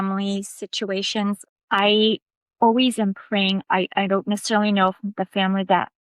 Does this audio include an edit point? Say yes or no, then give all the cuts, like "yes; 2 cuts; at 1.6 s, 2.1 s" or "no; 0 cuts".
yes; 1 cut; at 1.4 s